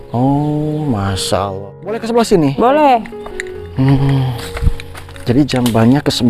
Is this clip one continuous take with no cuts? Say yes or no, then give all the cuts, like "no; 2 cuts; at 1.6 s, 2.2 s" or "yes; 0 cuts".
no; 1 cut; at 2.0 s